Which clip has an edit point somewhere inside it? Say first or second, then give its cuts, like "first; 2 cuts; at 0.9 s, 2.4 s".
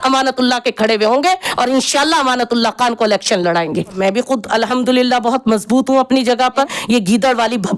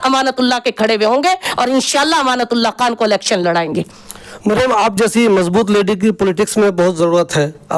first; 2 cuts; at 4.0 s, 6.7 s